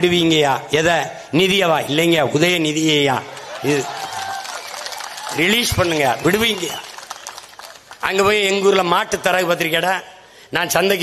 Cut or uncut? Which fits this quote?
uncut